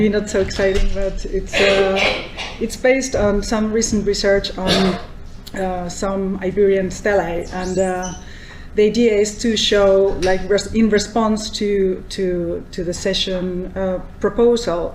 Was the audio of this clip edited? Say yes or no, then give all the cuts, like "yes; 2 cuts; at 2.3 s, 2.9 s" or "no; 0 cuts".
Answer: no; 0 cuts